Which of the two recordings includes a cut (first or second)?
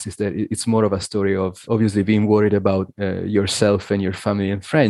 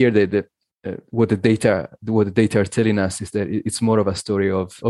first